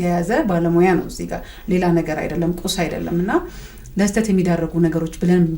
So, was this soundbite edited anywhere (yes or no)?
no